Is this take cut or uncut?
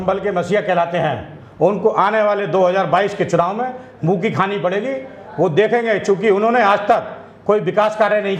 uncut